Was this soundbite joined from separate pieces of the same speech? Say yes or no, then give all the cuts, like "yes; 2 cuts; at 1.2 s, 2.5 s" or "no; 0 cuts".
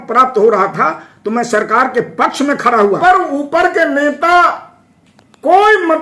yes; 1 cut; at 3.0 s